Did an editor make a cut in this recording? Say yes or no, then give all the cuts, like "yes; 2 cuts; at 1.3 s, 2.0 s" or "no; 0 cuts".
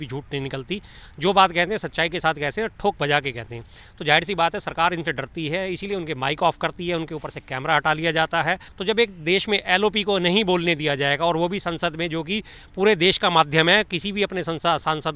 yes; 1 cut; at 8.7 s